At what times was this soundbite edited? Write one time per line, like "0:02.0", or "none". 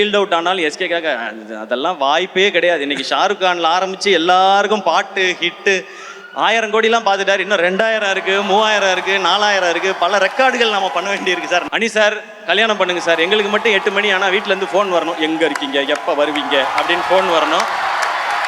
0:11.7